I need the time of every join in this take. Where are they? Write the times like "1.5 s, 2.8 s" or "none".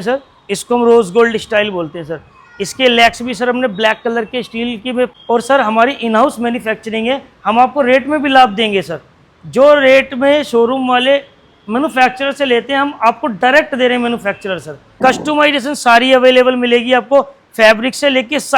5.1 s, 14.9 s